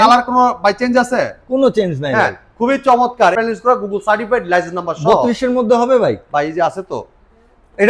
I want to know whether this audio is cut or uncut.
cut